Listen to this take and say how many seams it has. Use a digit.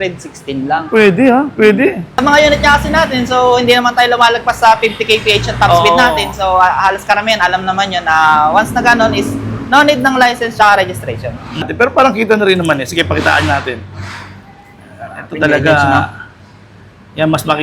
2